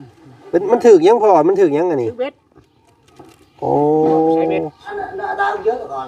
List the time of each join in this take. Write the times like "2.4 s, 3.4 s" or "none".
4.9 s